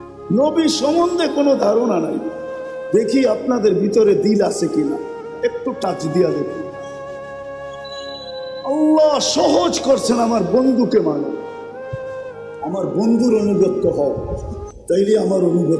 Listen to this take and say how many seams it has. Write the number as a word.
four